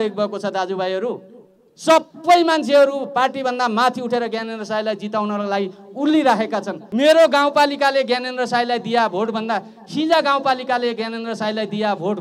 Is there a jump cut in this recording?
yes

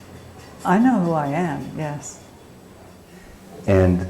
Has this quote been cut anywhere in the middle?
yes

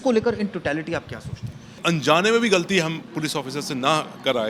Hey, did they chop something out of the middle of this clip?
yes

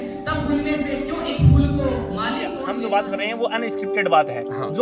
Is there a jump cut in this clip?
yes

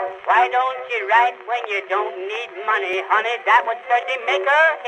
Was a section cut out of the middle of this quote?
yes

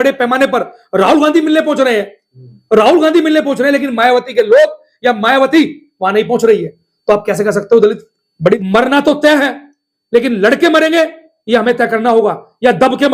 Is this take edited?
yes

